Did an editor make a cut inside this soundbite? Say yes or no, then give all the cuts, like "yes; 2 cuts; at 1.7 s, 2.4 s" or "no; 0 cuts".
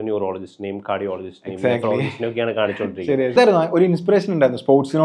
yes; 1 cut; at 3.3 s